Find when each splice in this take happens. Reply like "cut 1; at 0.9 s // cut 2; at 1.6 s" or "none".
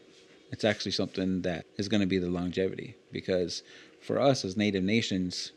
cut 1; at 1.7 s